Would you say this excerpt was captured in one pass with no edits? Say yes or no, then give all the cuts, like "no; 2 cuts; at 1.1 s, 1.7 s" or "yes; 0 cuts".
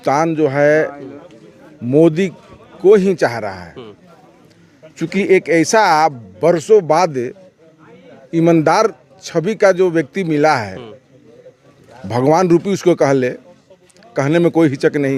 yes; 0 cuts